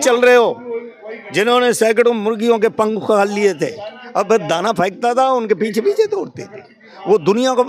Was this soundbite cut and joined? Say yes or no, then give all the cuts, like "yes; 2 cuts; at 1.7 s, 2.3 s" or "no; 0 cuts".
no; 0 cuts